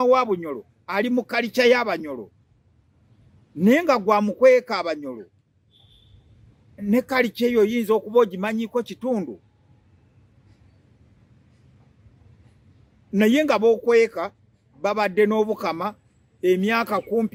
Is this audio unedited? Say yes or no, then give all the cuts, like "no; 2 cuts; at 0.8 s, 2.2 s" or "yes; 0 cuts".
yes; 0 cuts